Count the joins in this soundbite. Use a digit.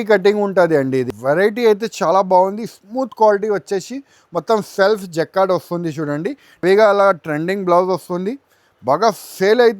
2